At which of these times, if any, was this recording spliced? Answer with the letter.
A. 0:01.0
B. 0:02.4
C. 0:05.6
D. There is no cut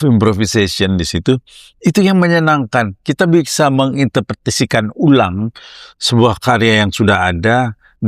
D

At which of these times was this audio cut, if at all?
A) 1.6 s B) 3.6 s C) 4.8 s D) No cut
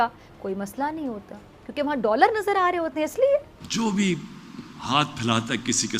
B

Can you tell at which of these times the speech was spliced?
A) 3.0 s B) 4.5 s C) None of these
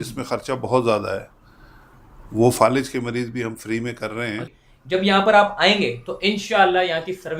B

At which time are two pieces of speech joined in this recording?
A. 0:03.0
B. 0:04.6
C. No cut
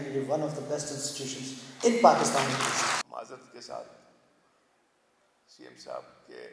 A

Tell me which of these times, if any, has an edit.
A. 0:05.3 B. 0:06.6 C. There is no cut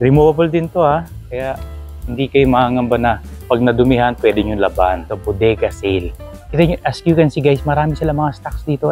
A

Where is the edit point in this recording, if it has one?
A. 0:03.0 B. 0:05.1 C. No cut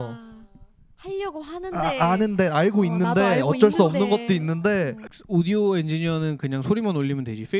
B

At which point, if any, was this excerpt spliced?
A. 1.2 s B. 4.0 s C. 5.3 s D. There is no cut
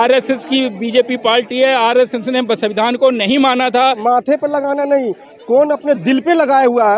B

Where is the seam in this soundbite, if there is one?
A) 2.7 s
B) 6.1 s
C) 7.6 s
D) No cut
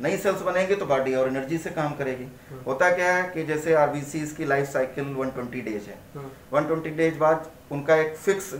D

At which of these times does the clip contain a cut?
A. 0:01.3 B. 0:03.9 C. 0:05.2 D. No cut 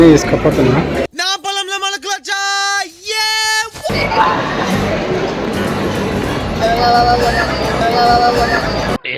B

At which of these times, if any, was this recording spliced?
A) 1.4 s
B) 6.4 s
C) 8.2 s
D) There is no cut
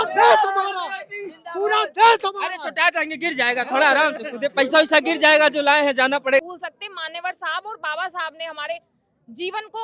B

